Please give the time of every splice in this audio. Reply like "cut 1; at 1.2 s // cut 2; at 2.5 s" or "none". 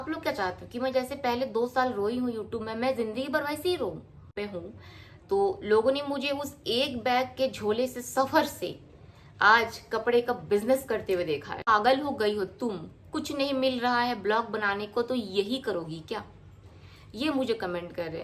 cut 1; at 4.3 s // cut 2; at 11.6 s